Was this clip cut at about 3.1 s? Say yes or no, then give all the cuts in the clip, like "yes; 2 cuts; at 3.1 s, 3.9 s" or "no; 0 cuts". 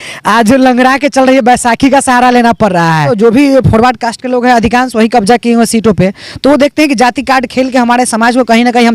yes; 1 cut; at 3.1 s